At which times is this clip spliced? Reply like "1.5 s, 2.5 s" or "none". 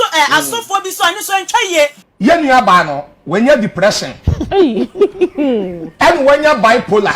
2.0 s